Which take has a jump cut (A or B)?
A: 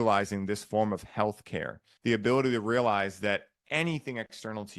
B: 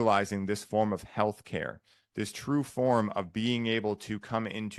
A